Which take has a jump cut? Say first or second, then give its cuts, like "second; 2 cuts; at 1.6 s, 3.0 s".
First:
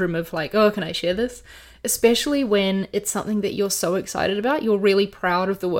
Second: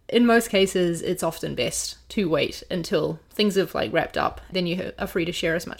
second; 1 cut; at 4.5 s